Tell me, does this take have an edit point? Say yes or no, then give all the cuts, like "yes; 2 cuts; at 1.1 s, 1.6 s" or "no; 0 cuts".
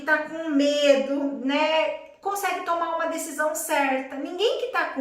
no; 0 cuts